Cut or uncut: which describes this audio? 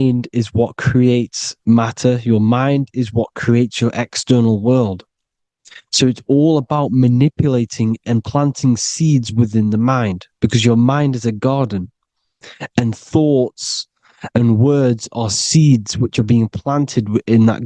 uncut